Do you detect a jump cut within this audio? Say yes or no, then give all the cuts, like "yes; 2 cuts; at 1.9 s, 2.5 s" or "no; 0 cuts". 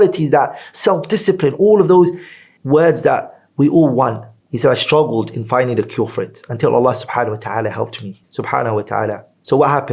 yes; 1 cut; at 8.2 s